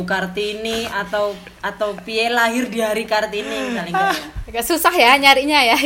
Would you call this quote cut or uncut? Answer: cut